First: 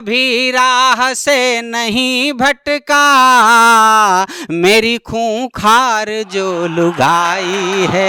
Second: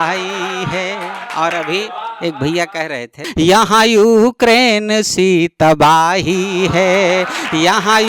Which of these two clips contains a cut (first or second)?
second